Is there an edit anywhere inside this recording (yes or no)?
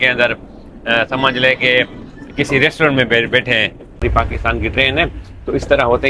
yes